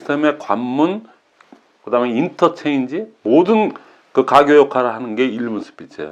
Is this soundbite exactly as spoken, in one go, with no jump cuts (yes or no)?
yes